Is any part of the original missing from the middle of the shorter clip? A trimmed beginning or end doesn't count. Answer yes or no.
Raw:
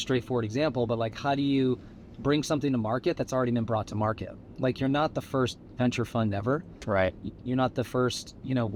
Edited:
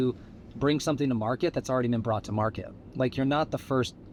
no